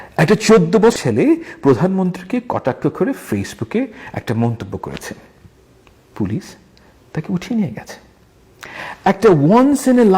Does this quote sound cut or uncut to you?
cut